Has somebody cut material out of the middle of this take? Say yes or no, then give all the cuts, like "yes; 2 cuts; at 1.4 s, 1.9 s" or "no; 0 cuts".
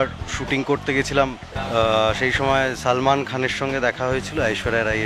yes; 1 cut; at 1.5 s